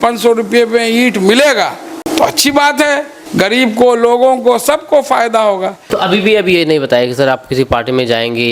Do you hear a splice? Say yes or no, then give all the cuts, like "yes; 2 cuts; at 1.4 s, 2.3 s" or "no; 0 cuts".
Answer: yes; 3 cuts; at 2.0 s, 3.2 s, 5.8 s